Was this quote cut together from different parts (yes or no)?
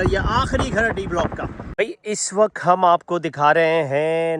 yes